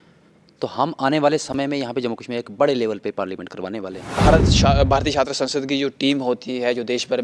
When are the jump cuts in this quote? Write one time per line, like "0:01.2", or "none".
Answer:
0:04.2